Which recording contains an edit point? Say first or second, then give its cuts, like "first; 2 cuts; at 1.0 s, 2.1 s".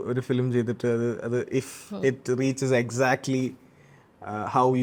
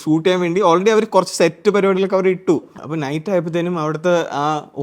second; 1 cut; at 2.8 s